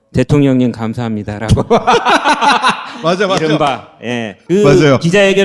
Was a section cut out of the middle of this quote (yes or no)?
no